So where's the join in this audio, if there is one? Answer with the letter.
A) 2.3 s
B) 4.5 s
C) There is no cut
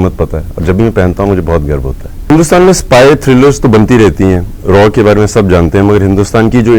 A